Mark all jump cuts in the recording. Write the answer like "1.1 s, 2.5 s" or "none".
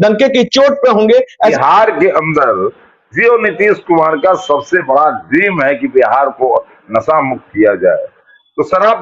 1.5 s